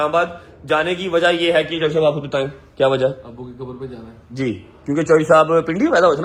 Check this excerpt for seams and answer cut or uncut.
uncut